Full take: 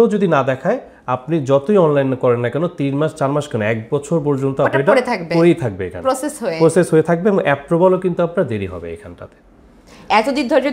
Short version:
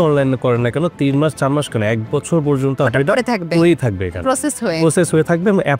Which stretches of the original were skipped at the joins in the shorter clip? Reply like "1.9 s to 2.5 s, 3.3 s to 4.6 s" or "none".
none